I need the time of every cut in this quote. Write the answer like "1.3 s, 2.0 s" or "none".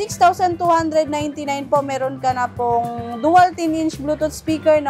none